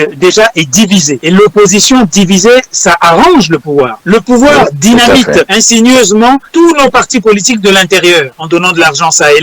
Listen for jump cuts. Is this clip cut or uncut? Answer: cut